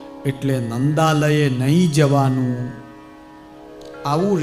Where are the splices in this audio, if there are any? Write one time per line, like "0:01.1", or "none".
none

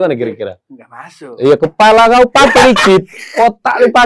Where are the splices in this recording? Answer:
none

